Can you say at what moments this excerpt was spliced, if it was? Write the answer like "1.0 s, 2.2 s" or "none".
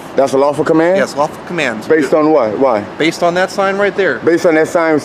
none